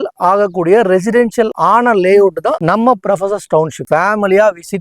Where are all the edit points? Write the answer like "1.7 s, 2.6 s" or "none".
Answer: 1.6 s, 3.8 s